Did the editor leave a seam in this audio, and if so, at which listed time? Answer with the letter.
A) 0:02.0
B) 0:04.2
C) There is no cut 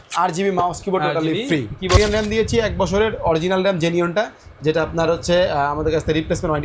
A